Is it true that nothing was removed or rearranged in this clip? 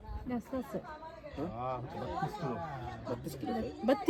yes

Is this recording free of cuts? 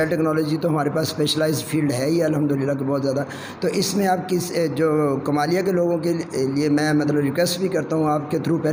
yes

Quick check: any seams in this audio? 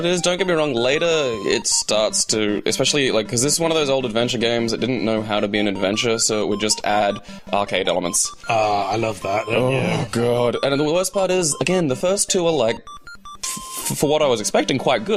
yes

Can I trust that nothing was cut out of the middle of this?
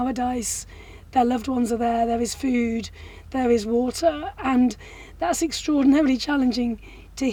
yes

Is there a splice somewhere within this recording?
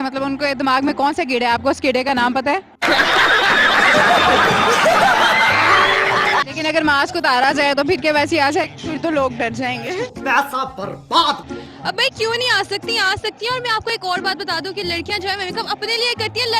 yes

